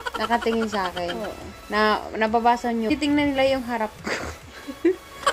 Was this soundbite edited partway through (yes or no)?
yes